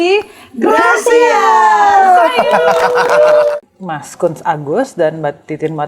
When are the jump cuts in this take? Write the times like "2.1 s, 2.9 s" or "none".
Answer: 3.5 s